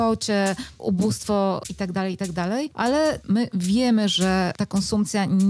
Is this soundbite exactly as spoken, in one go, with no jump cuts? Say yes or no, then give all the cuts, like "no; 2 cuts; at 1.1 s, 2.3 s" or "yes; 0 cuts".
no; 3 cuts; at 1.7 s, 3.1 s, 4.6 s